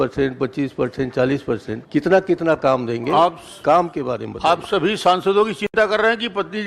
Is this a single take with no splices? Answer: no; 1 cut; at 1.8 s

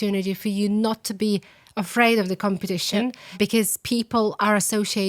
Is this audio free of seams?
no; 1 cut; at 3.3 s

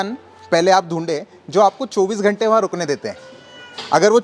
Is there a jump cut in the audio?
no; 0 cuts

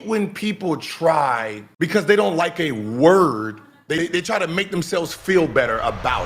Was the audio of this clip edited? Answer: no; 0 cuts

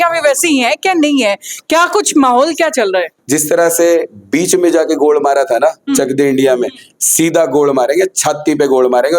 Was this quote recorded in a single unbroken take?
no; 1 cut; at 3.2 s

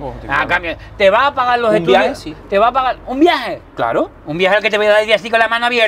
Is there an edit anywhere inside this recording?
no; 0 cuts

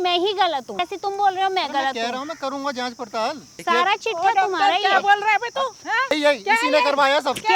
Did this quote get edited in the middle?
yes; 3 cuts; at 0.9 s, 3.5 s, 6.1 s

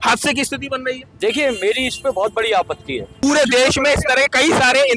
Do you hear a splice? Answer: yes; 1 cut; at 3.2 s

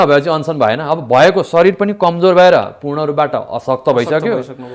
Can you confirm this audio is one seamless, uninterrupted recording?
yes; 0 cuts

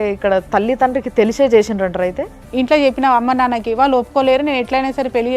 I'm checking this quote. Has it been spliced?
yes; 1 cut; at 2.4 s

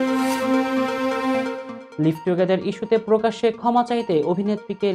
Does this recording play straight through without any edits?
yes; 0 cuts

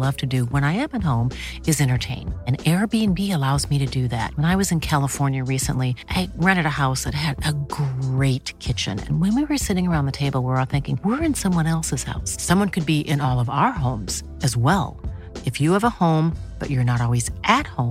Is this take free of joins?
yes; 0 cuts

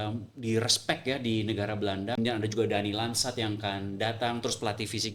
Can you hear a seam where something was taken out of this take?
yes; 1 cut; at 2.2 s

